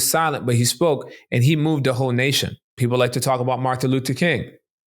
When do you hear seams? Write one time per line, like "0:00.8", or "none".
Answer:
0:02.7